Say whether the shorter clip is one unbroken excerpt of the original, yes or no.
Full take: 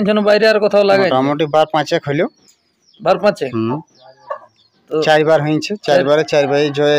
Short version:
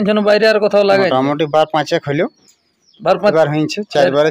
no